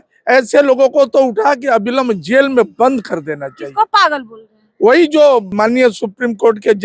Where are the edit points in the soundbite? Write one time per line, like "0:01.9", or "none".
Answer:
0:05.5